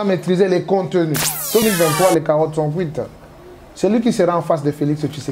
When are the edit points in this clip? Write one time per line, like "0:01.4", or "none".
0:01.6